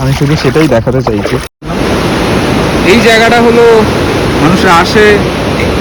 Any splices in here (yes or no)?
yes